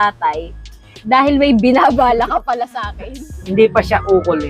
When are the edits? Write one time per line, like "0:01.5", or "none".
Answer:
0:03.2

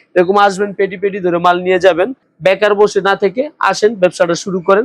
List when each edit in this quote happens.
0:02.2

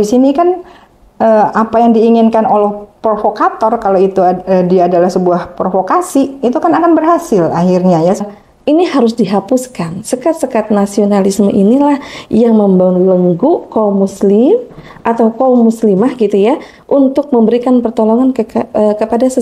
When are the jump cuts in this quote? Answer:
0:08.3

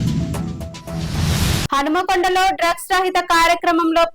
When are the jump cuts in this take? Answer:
0:01.6

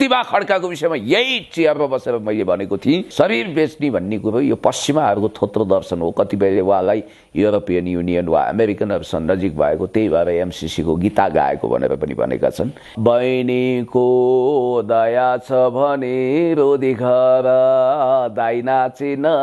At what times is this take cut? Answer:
0:03.1
0:12.9

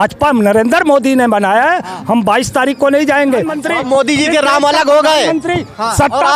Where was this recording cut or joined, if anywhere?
0:03.6

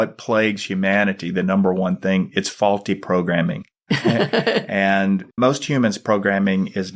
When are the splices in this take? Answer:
0:03.7
0:05.3

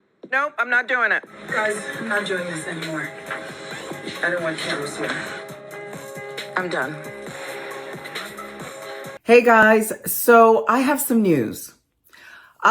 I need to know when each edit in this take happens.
0:01.3
0:09.1

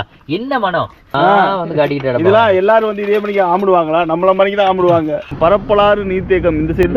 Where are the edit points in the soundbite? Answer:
0:01.1
0:05.3

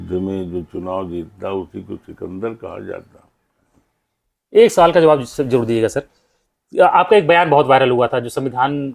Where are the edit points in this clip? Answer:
0:03.7

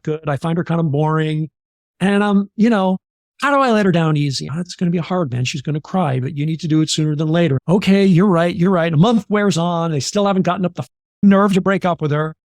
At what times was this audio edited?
0:03.1
0:04.4
0:07.6

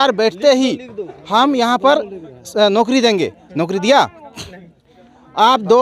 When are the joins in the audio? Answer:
none

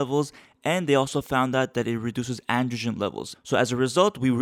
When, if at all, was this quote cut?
0:03.3

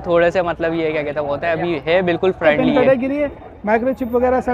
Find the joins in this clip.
0:02.4

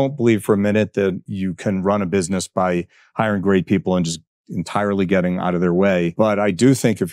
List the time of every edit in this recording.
0:01.2
0:06.1

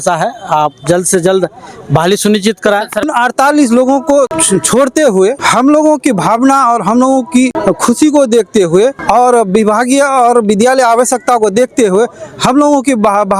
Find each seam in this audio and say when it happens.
0:03.0
0:04.4
0:05.4
0:07.6
0:09.0

